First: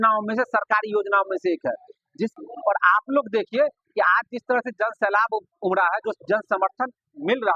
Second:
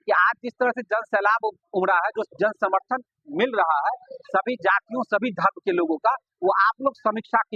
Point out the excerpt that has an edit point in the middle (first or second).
first